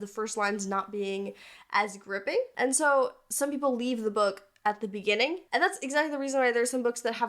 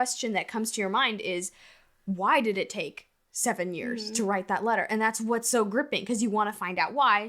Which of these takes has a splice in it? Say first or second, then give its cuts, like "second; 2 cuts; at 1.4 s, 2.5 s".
first; 2 cuts; at 2.5 s, 5.4 s